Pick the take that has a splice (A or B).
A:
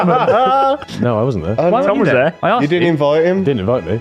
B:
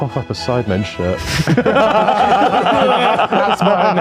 A